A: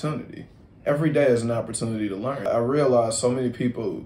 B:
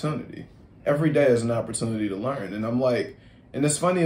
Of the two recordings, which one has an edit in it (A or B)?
A